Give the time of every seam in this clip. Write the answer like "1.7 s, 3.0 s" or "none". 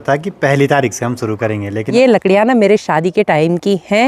1.8 s